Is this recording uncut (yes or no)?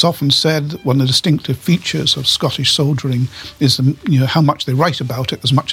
no